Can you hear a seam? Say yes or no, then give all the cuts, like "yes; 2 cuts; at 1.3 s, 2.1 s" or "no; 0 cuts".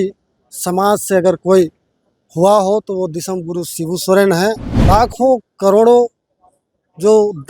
yes; 1 cut; at 4.7 s